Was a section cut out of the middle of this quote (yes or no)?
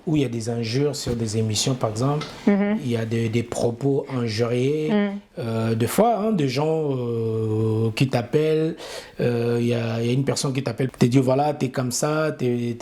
no